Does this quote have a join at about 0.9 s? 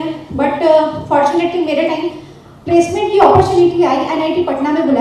no; 0 cuts

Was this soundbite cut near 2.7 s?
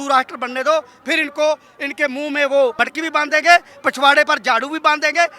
yes; 1 cut; at 2.7 s

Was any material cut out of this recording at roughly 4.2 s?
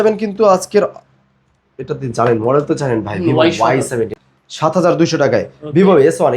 yes; 1 cut; at 4.2 s

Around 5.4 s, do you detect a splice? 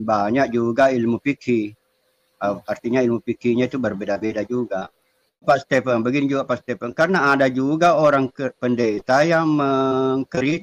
yes; 1 cut; at 5.4 s

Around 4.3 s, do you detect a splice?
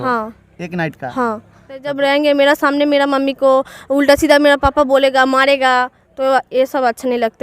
no; 1 cut; at 1.9 s

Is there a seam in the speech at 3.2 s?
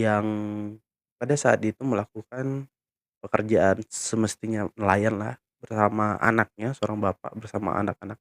yes; 1 cut; at 3.2 s

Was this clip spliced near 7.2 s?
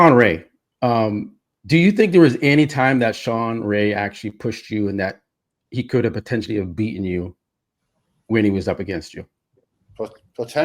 no; 0 cuts

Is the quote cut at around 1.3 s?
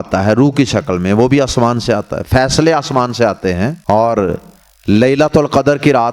no; 1 cut; at 3.8 s

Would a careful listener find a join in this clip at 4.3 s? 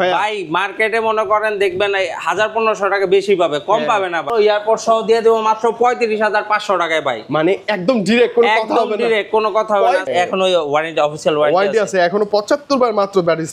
yes; 2 cuts; at 4.3 s, 10.1 s

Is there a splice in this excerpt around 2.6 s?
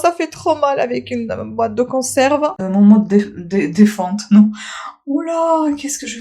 yes; 1 cut; at 2.6 s

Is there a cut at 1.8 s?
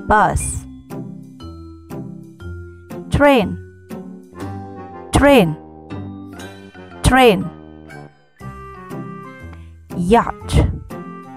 no; 4 cuts; at 3.5 s, 5.1 s, 7.8 s, 9.5 s

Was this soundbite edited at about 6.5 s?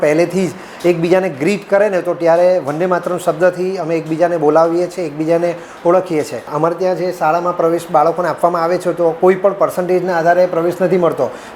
yes; 1 cut; at 6.5 s

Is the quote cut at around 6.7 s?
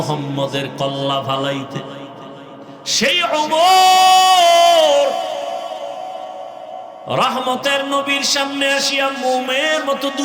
no; 1 cut; at 2.8 s

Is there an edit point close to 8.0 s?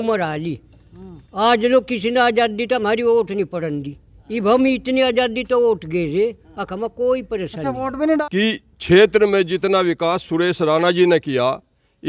yes; 1 cut; at 8.0 s

